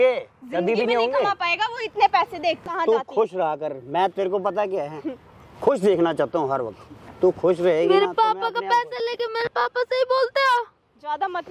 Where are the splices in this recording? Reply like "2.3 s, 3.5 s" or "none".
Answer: 2.7 s